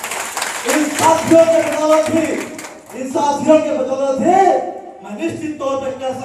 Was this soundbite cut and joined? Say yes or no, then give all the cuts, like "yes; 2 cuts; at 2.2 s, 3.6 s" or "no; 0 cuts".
no; 0 cuts